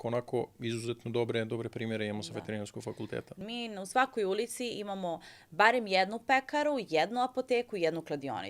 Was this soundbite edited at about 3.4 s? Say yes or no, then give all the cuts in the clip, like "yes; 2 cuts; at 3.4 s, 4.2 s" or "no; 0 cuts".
yes; 1 cut; at 3.4 s